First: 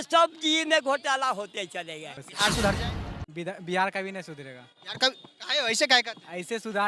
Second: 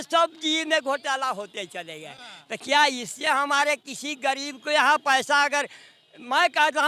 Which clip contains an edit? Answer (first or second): first